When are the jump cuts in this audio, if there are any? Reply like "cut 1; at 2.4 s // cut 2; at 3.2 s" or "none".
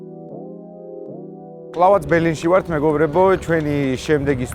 cut 1; at 1.7 s